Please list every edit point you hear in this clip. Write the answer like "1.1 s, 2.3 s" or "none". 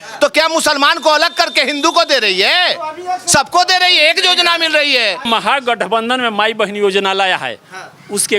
5.3 s